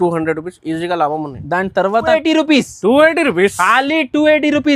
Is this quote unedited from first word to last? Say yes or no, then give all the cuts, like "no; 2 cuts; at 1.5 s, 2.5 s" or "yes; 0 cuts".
no; 1 cut; at 2.1 s